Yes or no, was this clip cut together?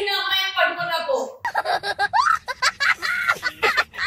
yes